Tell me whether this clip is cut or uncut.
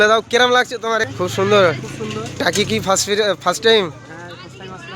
cut